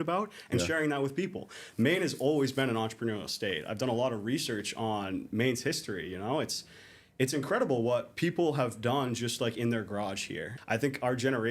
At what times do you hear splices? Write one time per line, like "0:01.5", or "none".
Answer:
0:10.5